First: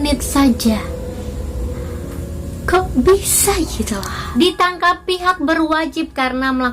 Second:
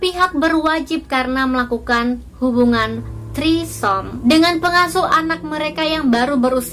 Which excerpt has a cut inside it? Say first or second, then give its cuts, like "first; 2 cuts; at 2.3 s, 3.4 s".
first; 1 cut; at 4.1 s